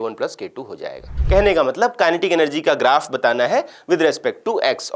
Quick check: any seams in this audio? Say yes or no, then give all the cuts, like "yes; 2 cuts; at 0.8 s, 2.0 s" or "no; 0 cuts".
yes; 1 cut; at 1.1 s